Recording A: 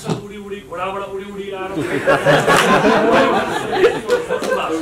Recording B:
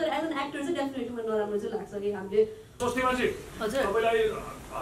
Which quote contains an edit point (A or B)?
B